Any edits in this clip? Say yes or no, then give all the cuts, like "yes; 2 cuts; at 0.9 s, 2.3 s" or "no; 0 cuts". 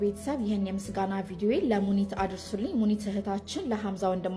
no; 0 cuts